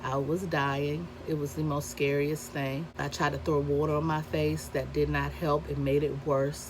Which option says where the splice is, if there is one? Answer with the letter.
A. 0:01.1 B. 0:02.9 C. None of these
B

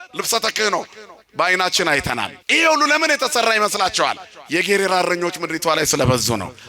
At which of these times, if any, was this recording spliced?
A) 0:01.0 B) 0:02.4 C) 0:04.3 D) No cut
B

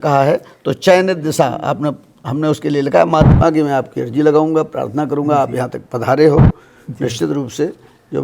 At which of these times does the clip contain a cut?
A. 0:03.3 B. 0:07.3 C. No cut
A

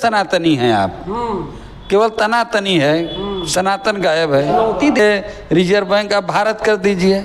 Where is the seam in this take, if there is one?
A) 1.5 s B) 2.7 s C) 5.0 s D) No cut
C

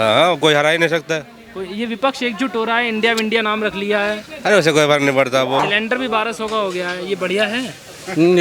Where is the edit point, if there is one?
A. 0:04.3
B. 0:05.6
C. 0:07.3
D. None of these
B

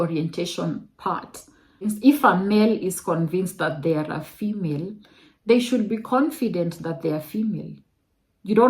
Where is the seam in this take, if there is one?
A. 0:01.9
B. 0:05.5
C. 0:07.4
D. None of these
A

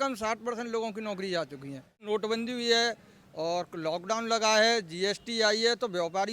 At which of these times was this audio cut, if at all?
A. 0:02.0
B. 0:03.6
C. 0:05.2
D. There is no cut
A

